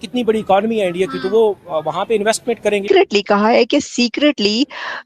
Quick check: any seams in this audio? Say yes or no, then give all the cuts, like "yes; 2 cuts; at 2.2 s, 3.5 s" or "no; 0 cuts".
yes; 1 cut; at 2.8 s